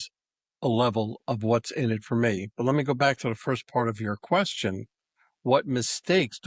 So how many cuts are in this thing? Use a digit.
0